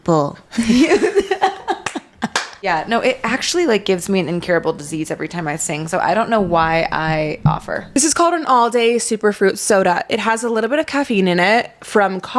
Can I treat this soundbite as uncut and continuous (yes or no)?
no